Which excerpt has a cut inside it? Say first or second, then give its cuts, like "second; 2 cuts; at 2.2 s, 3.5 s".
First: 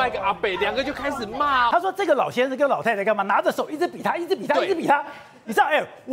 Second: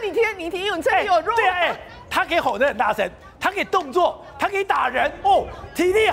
first; 1 cut; at 1.7 s